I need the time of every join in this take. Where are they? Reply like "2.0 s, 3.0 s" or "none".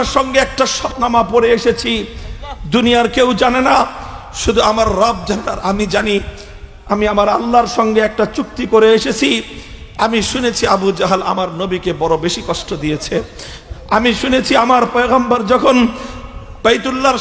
0.9 s